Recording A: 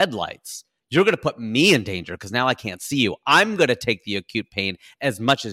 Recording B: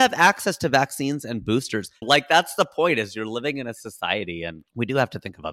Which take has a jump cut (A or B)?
B